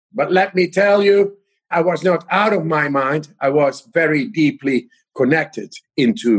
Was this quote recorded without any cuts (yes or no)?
yes